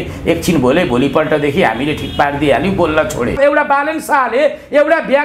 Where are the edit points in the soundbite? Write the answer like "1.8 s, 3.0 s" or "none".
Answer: 3.4 s